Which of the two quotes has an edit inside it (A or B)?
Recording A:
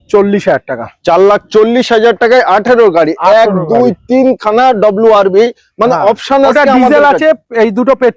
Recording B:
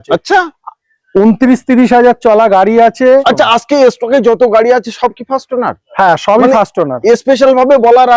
B